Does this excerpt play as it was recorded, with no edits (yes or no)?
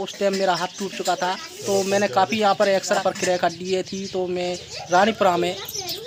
yes